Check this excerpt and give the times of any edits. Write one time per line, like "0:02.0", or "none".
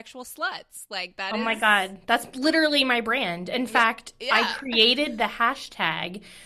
0:01.3